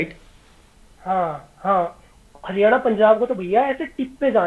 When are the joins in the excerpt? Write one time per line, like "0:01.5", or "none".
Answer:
none